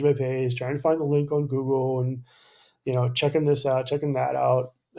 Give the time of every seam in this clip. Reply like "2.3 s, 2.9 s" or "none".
none

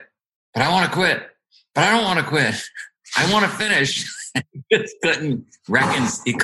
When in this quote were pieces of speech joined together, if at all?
none

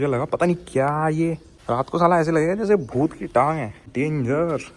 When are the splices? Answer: 1.5 s, 3.8 s

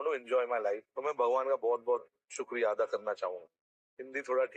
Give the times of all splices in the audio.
none

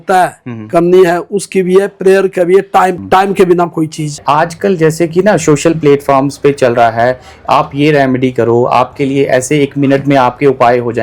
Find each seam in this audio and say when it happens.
3.0 s, 4.2 s

